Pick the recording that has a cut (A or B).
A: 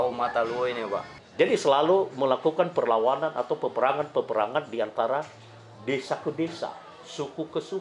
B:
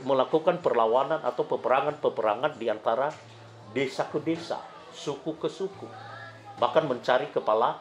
A